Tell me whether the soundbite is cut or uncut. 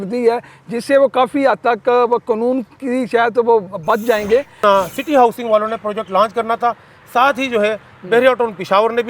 cut